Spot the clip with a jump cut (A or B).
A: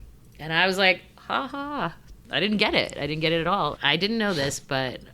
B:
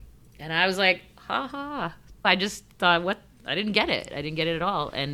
A